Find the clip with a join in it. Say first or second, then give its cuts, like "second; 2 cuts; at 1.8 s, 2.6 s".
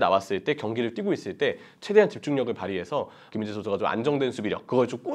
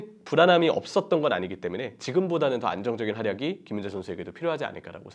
first; 1 cut; at 3.2 s